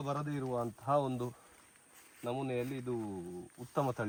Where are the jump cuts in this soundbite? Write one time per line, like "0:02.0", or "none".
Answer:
none

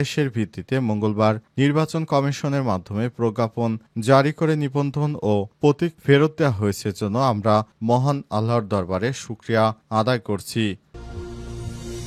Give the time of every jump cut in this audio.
0:10.8

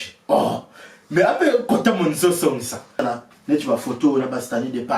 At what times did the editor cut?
0:03.0

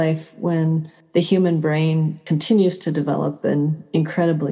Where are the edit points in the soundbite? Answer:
0:00.9
0:02.2

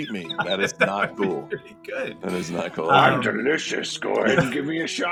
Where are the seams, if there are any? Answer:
none

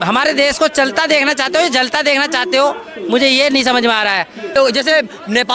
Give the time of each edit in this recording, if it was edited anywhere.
0:04.5

